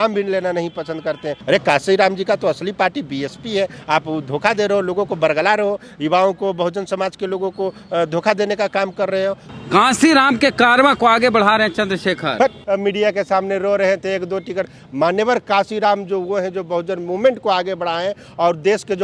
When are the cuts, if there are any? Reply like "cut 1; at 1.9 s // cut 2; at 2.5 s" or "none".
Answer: cut 1; at 1.3 s // cut 2; at 12.6 s